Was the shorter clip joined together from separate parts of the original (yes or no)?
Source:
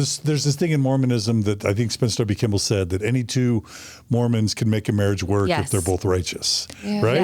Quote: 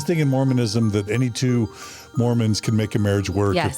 yes